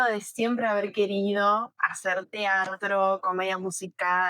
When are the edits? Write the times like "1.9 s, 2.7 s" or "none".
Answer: none